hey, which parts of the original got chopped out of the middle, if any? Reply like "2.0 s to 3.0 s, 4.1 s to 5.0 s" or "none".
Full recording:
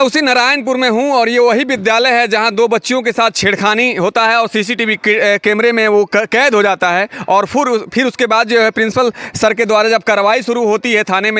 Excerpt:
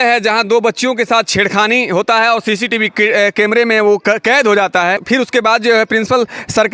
7.1 s to 7.9 s